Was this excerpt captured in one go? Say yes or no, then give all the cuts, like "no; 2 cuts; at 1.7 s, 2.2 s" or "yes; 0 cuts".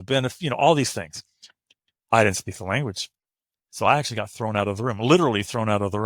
yes; 0 cuts